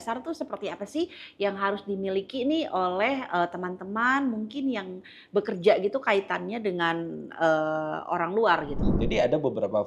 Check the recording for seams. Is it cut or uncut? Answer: cut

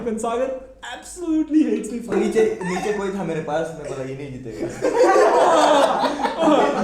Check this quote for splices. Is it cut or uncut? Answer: cut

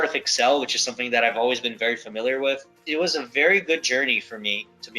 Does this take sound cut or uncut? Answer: cut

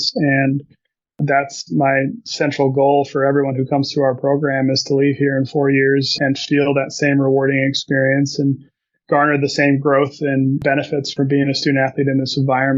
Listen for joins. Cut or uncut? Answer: cut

